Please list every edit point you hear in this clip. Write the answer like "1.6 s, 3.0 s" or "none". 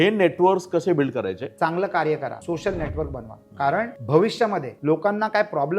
1.4 s, 2.4 s, 4.0 s, 4.7 s